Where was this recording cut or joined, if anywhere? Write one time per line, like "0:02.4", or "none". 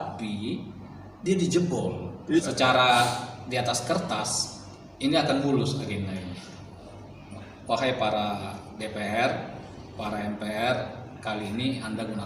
0:02.4
0:07.0